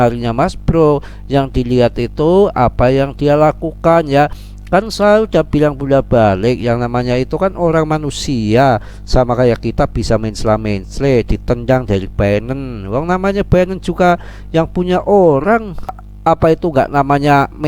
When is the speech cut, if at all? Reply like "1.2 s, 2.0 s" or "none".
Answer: 16.0 s